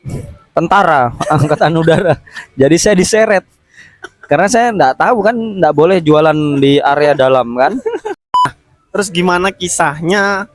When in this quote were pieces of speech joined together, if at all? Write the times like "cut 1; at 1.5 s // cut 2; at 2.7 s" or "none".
cut 1; at 8.6 s